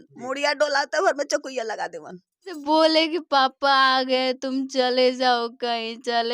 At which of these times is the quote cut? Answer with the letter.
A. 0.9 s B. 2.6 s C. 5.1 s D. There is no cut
B